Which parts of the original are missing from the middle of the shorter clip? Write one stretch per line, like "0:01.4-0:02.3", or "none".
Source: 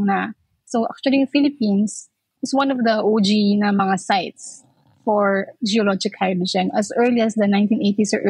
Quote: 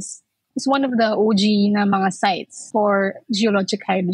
0:04.4-0:04.9